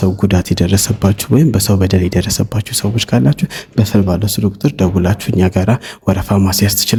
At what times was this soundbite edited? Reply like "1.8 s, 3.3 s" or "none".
none

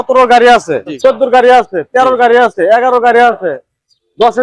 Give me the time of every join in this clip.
1.0 s

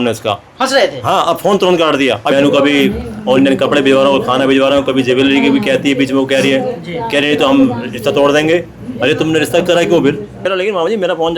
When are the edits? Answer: 2.3 s, 10.3 s

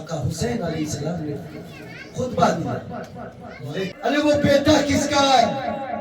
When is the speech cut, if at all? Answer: 3.9 s

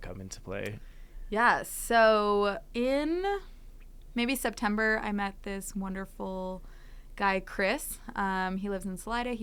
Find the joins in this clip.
none

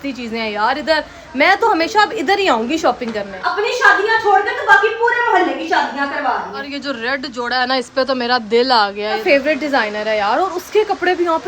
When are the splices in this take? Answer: 3.4 s, 6.7 s, 9.2 s

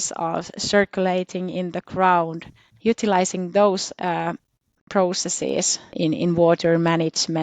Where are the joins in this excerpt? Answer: 5.9 s

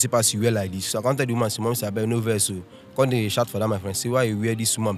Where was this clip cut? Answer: none

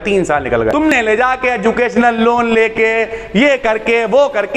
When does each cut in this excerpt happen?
0.9 s

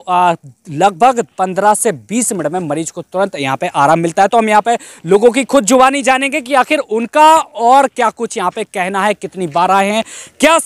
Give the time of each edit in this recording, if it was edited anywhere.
none

